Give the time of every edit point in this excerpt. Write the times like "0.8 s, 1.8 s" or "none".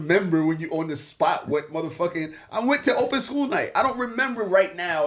none